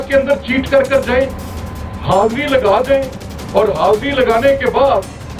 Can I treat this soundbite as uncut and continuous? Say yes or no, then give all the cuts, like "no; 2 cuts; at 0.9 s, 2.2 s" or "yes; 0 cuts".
yes; 0 cuts